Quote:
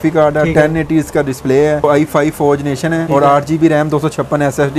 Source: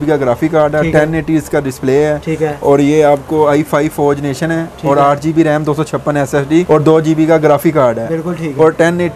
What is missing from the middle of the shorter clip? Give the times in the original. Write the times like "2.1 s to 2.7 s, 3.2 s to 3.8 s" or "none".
2.2 s to 3.4 s, 4.6 s to 4.8 s